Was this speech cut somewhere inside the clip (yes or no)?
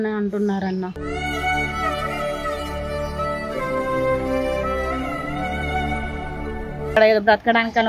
yes